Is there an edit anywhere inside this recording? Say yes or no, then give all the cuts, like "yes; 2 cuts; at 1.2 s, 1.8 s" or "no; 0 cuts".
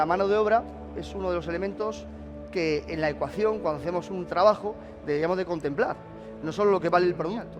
no; 0 cuts